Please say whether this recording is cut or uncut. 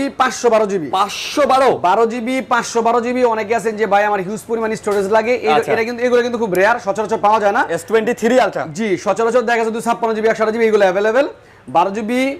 uncut